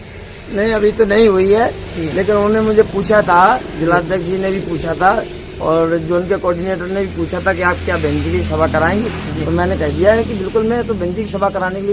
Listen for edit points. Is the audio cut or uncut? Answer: uncut